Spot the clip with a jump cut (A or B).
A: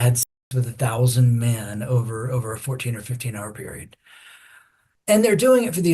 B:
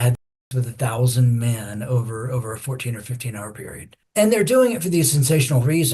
B